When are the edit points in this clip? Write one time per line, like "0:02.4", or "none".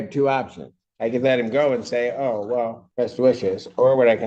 0:02.8